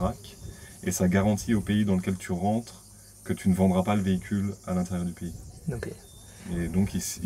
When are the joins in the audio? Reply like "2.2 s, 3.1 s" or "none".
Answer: none